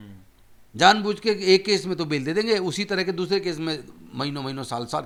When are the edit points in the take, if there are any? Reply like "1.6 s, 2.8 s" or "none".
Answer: none